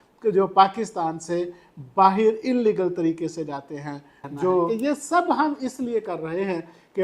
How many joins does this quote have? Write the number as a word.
one